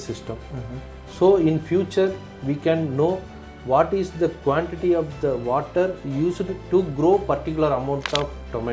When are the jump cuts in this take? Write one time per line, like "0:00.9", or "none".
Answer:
none